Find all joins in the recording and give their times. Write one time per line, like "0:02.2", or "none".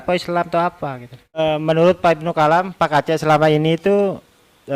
0:01.4